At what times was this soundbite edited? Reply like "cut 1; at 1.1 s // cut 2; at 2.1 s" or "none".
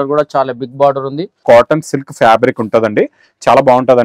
cut 1; at 1.4 s